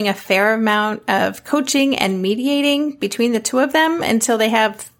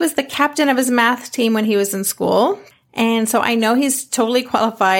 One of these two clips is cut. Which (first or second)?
second